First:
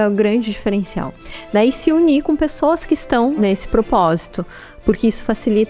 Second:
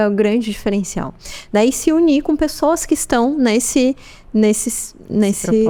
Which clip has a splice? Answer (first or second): first